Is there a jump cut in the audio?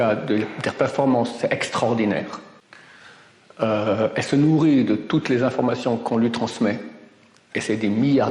no; 0 cuts

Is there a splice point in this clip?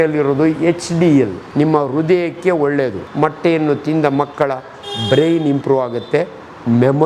yes; 2 cuts; at 1.4 s, 3.0 s

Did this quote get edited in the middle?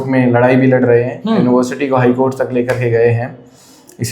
no; 0 cuts

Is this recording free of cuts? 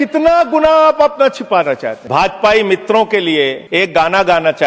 no; 2 cuts; at 1.9 s, 3.6 s

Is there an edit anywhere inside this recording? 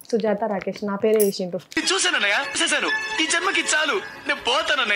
no; 0 cuts

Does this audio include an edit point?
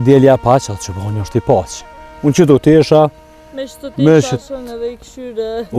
no; 0 cuts

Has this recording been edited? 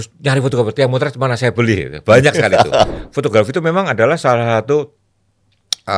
yes; 1 cut; at 3.0 s

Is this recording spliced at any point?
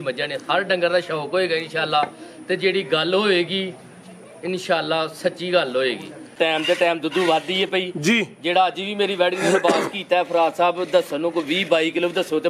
yes; 1 cut; at 6.3 s

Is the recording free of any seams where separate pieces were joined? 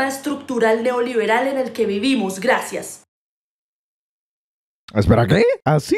yes; 0 cuts

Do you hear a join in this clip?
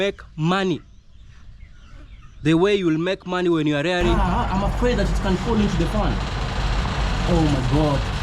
yes; 1 cut; at 4.2 s

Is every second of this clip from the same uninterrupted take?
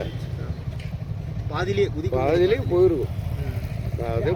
yes; 0 cuts

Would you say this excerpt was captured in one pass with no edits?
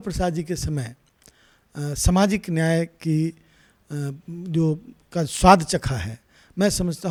yes; 0 cuts

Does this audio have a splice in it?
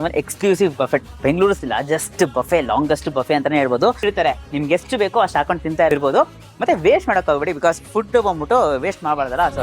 yes; 1 cut; at 4.0 s

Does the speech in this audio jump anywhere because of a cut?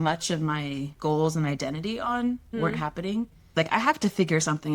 yes; 3 cuts; at 0.9 s, 2.5 s, 3.5 s

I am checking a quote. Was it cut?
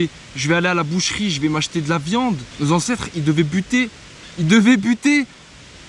yes; 1 cut; at 2.5 s

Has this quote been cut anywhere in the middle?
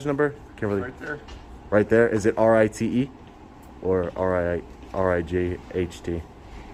no; 0 cuts

